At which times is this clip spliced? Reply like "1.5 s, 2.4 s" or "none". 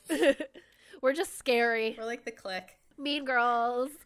2.5 s